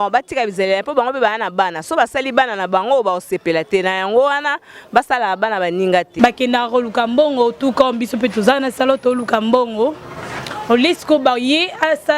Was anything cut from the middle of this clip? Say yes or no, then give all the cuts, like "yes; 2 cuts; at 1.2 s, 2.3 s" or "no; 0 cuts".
yes; 1 cut; at 6.1 s